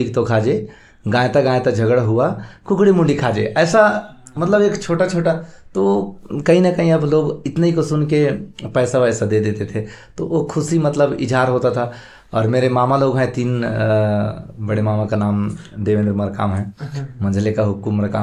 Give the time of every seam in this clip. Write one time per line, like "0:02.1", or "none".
none